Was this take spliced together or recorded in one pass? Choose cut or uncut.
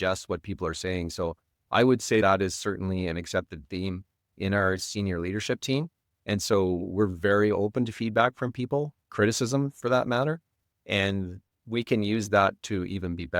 uncut